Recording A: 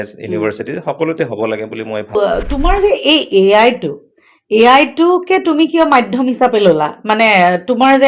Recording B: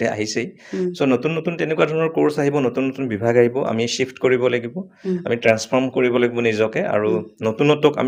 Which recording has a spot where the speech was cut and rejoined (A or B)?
A